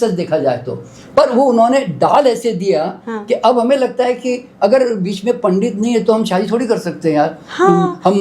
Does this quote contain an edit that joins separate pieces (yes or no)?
no